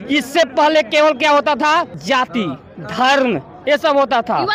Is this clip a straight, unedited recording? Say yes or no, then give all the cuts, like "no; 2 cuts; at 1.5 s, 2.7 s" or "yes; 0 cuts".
no; 1 cut; at 2.0 s